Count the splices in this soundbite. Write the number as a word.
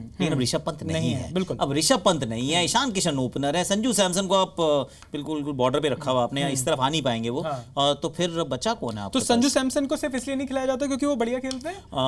zero